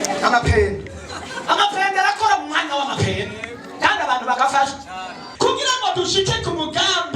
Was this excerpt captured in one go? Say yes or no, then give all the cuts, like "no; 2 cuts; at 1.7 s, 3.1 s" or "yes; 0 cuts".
no; 1 cut; at 5.2 s